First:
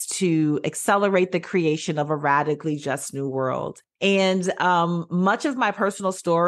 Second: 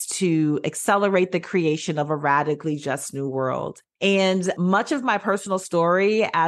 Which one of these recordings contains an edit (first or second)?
second